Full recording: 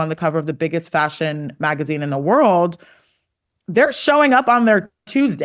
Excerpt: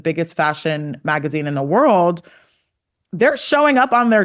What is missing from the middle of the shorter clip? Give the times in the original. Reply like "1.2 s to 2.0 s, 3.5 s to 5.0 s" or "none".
none